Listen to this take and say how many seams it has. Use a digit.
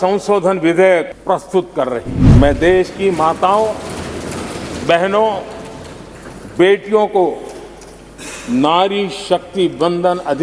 2